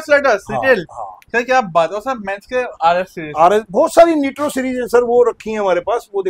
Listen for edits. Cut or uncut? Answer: uncut